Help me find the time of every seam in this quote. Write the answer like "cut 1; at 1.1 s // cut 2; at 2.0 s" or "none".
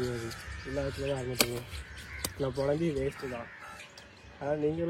none

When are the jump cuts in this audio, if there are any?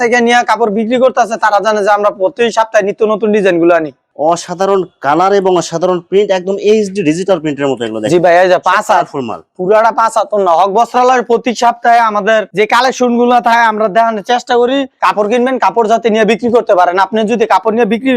cut 1; at 4.1 s // cut 2; at 14.9 s

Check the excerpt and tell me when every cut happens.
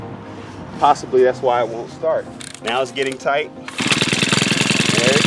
cut 1; at 2.4 s

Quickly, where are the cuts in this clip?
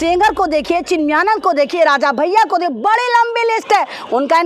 none

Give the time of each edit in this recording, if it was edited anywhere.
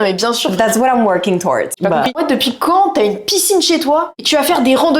cut 1; at 1.8 s // cut 2; at 4.2 s

